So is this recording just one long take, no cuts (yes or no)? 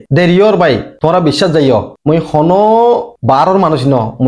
yes